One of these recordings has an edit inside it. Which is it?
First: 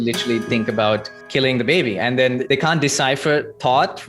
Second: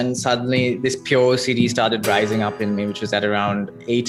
first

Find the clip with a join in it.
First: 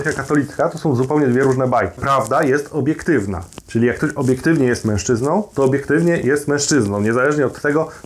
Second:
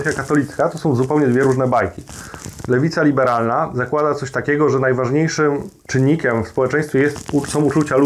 first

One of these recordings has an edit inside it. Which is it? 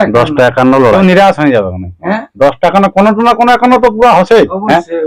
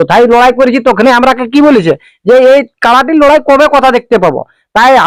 first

